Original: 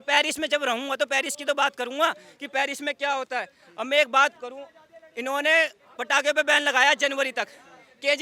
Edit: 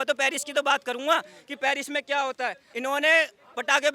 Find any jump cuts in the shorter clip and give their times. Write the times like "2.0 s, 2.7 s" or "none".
2.6 s